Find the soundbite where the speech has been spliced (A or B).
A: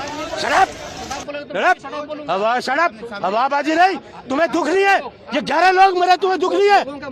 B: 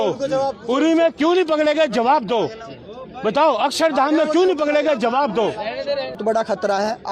B